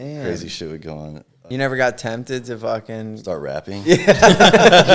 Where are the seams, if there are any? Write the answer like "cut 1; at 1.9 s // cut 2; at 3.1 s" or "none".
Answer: cut 1; at 1.3 s